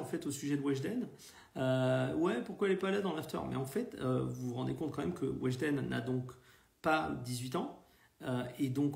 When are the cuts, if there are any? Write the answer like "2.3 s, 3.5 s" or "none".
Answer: none